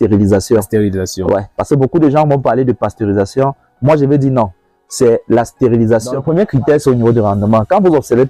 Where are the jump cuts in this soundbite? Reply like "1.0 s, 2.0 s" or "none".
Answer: 6.2 s